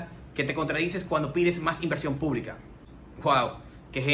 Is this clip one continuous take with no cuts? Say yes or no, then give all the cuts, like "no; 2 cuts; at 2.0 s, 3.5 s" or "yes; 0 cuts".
yes; 0 cuts